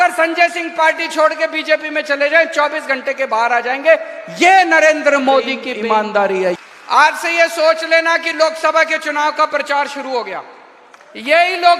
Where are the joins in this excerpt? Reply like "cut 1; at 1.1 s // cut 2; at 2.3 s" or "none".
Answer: cut 1; at 5.6 s // cut 2; at 6.6 s